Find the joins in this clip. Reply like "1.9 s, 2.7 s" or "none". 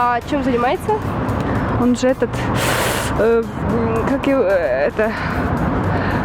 none